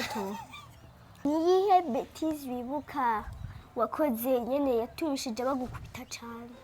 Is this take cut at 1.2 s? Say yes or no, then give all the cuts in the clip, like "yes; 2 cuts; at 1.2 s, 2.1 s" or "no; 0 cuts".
yes; 1 cut; at 1.2 s